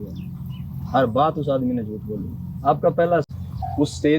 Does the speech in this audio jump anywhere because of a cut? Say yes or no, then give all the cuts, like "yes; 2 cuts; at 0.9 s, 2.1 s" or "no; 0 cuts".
yes; 1 cut; at 3.2 s